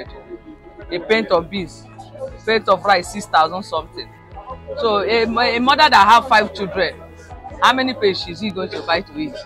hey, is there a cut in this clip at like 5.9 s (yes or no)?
no